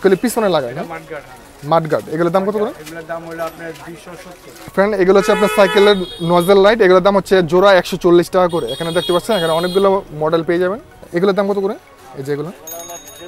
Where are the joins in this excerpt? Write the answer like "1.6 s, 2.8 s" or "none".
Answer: 4.7 s, 11.0 s